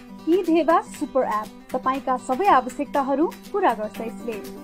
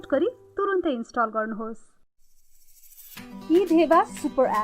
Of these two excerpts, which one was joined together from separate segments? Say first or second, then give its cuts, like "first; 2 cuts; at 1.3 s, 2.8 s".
second; 1 cut; at 1.9 s